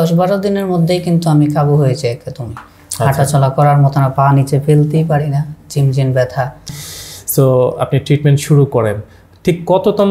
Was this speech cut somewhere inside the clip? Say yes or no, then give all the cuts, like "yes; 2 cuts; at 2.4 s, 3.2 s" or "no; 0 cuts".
yes; 1 cut; at 6.7 s